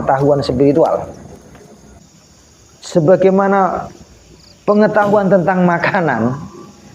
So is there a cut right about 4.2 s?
no; 1 cut; at 1.9 s

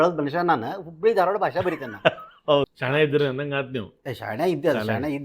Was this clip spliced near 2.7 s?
yes; 1 cut; at 2.7 s

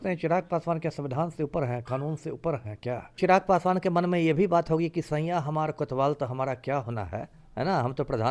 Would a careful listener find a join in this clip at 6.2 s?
no; 1 cut; at 3.2 s

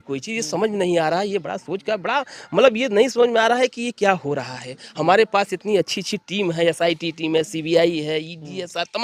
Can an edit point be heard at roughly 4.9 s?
no; 0 cuts

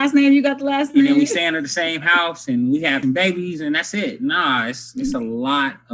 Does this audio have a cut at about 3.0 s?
yes; 1 cut; at 3.0 s

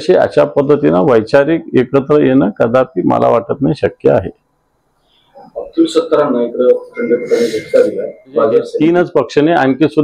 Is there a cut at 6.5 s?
no; 1 cut; at 8.7 s

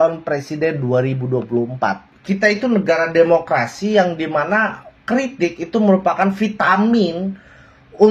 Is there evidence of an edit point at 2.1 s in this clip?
yes; 1 cut; at 2.1 s

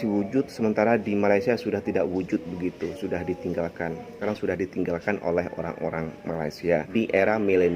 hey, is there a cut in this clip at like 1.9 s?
no; 2 cuts; at 4.2 s, 6.9 s

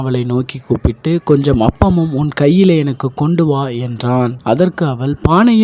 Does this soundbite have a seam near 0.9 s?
no; 1 cut; at 4.3 s

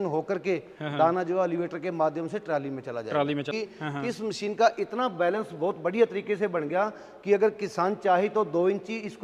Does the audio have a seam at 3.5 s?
yes; 1 cut; at 3.5 s

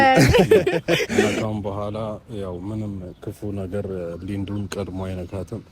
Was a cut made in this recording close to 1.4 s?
yes; 1 cut; at 1.4 s

